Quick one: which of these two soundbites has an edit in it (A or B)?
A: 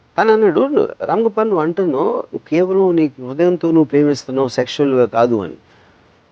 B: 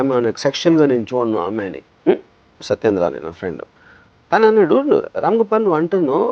B